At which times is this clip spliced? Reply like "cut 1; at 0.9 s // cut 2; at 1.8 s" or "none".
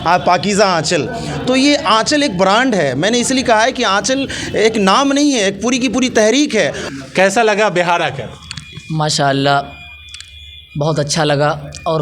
cut 1; at 6.8 s